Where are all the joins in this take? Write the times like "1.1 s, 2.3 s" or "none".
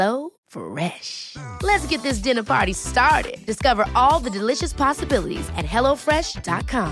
none